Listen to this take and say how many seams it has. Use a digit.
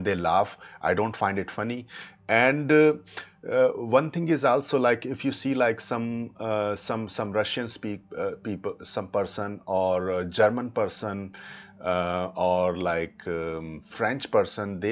1